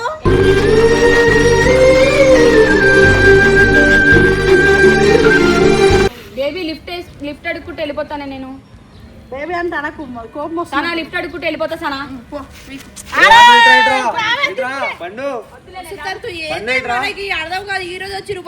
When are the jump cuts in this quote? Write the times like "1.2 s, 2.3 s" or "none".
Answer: 6.2 s

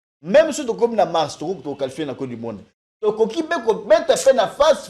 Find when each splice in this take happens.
none

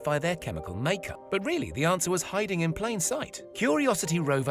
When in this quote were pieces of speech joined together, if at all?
1.1 s

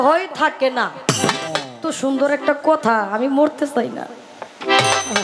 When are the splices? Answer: 1.8 s

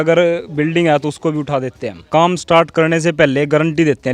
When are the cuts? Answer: 2.0 s

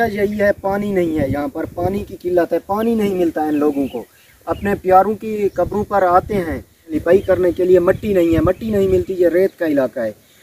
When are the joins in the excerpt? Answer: 6.9 s

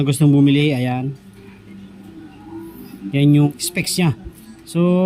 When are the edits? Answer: 3.5 s

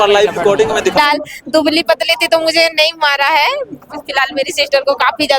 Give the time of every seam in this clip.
0.9 s

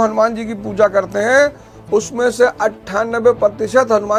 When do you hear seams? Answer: none

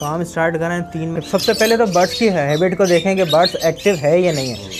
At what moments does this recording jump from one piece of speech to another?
1.2 s

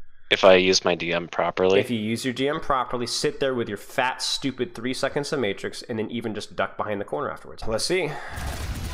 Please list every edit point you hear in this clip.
7.5 s

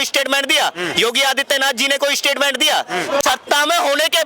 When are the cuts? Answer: 3.2 s

